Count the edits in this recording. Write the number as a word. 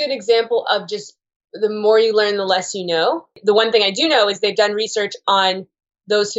one